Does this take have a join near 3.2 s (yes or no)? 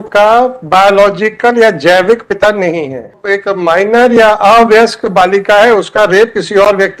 yes